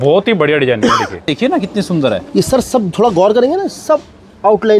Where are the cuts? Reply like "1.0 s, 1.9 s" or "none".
1.3 s